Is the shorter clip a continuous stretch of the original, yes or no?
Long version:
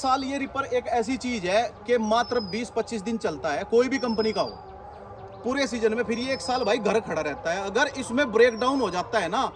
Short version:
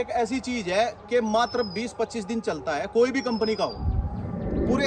yes